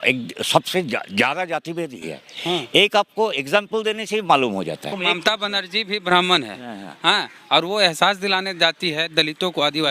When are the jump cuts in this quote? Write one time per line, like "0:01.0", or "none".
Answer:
0:05.0